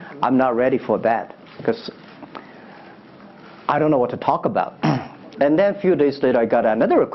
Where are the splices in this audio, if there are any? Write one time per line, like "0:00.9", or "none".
none